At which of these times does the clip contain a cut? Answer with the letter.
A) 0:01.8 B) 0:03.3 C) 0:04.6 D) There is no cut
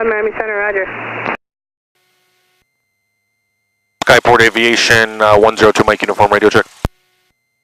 D